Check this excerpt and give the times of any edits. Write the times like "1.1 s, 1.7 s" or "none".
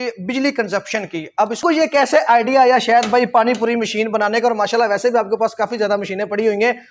1.6 s